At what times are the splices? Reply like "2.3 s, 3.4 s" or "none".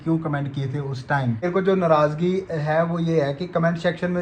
1.5 s